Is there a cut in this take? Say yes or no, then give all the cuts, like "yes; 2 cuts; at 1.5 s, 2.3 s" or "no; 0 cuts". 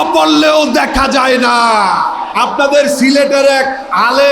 yes; 1 cut; at 2.2 s